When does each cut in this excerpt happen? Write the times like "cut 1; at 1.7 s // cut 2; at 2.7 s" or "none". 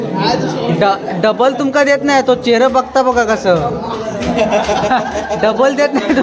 none